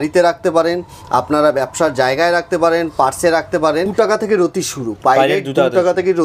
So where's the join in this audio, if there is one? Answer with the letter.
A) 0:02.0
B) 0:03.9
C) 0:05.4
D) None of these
B